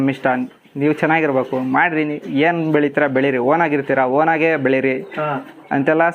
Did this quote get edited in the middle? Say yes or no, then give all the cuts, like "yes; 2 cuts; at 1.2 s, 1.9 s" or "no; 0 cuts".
no; 0 cuts